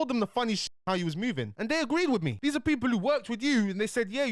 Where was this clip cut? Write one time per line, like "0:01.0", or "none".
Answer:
none

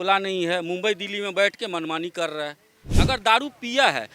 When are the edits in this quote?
0:03.0

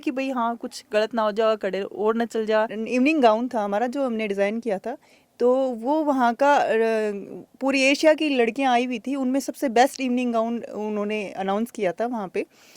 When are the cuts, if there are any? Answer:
0:02.8

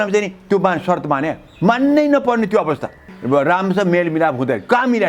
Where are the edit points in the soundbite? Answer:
0:03.1

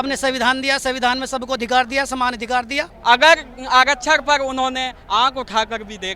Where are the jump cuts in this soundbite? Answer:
0:02.9

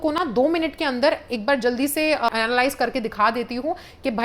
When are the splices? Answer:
0:02.3

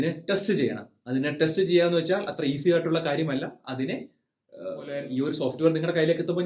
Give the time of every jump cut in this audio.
0:05.0

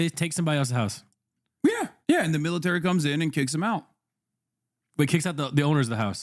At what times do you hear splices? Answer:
0:01.9

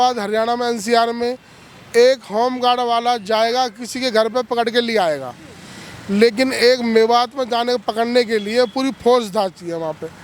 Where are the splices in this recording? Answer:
none

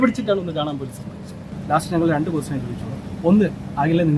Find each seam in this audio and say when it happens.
0:01.4

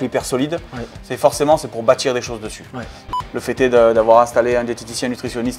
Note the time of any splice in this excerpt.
0:03.1

